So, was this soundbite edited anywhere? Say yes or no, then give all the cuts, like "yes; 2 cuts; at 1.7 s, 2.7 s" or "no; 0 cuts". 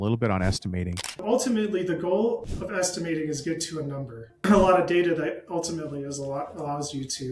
yes; 2 cuts; at 1.2 s, 4.4 s